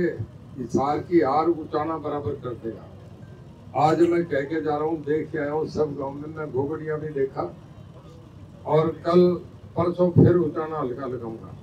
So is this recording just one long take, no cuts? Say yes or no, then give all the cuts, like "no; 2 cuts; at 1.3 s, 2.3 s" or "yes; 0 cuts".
yes; 0 cuts